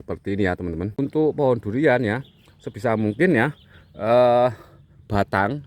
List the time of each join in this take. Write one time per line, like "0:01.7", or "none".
0:00.9